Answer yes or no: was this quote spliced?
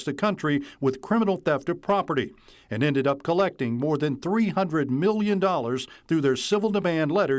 no